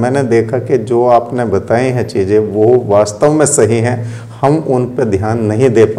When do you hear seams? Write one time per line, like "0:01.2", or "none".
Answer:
none